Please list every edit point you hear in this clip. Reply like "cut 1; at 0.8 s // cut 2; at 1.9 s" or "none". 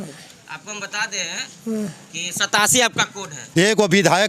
cut 1; at 3.4 s